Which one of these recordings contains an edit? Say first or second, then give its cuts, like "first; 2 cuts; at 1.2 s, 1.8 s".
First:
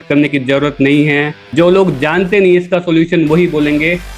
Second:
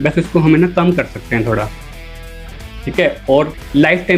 first; 1 cut; at 1.4 s